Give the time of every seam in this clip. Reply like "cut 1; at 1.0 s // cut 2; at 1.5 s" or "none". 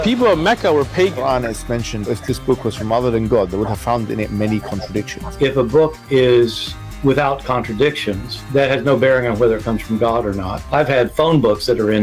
cut 1; at 5.5 s

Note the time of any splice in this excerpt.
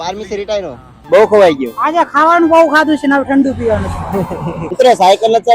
cut 1; at 1.0 s // cut 2; at 4.7 s

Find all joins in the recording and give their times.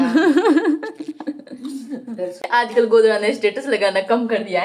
cut 1; at 2.4 s

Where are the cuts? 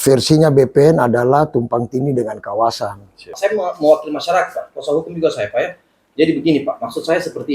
cut 1; at 3.3 s

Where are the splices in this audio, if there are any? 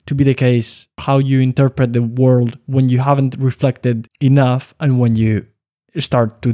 cut 1; at 1.0 s // cut 2; at 4.1 s

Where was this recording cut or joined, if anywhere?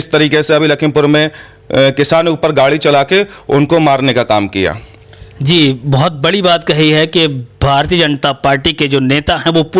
none

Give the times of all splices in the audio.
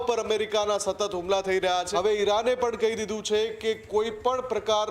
cut 1; at 1.9 s

